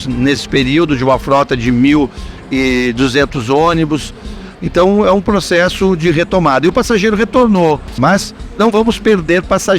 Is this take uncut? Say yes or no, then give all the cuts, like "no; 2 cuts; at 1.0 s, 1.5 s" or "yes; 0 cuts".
no; 2 cuts; at 4.4 s, 7.9 s